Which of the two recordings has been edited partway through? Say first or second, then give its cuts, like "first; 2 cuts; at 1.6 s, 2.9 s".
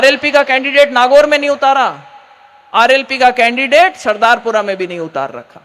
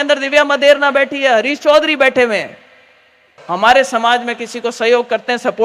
second; 1 cut; at 3.4 s